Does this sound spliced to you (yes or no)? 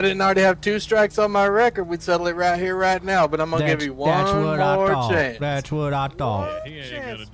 no